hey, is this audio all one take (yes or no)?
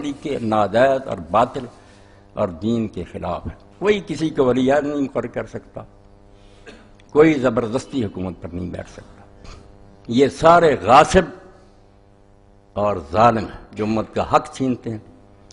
no